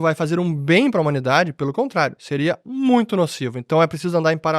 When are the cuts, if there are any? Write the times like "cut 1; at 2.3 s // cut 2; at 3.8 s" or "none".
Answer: cut 1; at 3.6 s